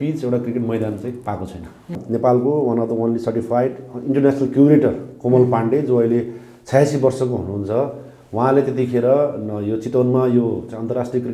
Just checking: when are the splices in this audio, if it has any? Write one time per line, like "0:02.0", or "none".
0:02.0